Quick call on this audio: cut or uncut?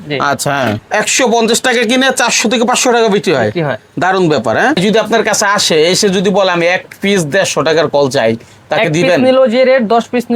cut